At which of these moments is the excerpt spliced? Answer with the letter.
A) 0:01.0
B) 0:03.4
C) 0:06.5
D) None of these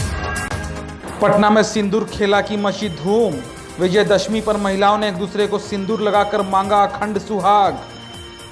D